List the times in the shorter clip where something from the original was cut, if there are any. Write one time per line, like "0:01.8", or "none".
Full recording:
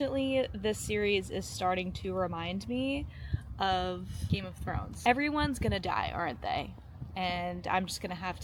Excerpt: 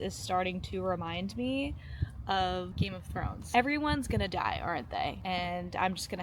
0:02.7
0:05.2